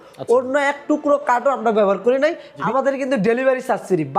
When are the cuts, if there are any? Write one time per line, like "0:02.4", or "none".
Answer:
0:02.5